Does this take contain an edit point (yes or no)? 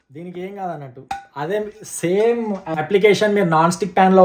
yes